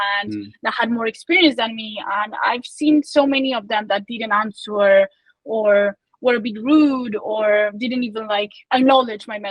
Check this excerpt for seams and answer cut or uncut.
cut